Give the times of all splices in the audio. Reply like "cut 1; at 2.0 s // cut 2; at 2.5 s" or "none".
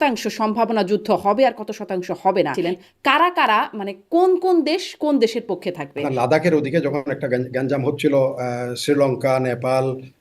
cut 1; at 2.5 s // cut 2; at 6.0 s